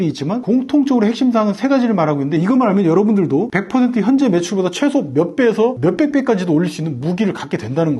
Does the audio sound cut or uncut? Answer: cut